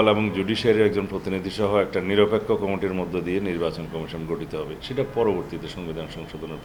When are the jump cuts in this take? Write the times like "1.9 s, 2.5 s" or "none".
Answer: none